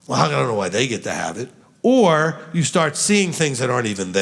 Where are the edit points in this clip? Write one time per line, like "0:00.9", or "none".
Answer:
none

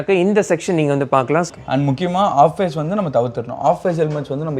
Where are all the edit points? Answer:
0:01.5

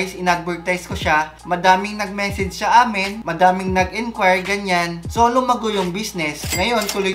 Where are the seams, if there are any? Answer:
none

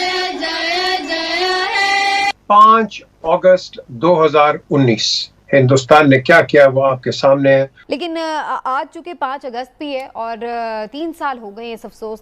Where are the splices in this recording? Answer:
0:02.3
0:07.8

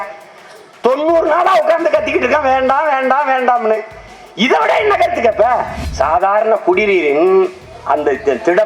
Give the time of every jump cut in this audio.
0:05.8
0:07.7

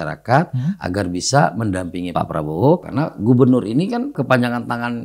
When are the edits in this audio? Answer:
0:02.1
0:02.9
0:04.2

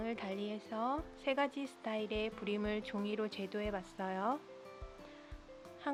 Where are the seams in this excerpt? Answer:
none

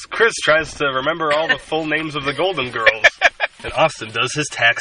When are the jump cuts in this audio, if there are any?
0:03.6

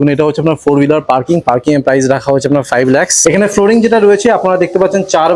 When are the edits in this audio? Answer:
0:03.1

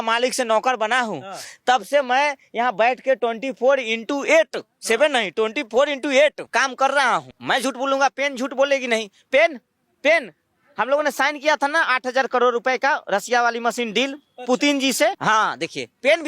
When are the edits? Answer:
0:06.4
0:07.3
0:15.2

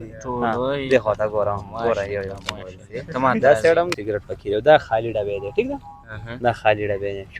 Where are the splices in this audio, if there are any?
0:04.0

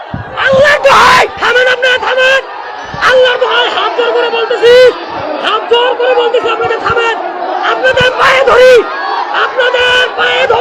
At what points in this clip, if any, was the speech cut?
none

